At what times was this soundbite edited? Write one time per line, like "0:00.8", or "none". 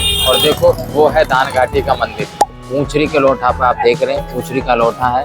0:02.5